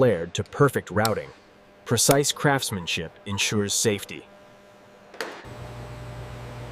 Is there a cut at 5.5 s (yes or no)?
yes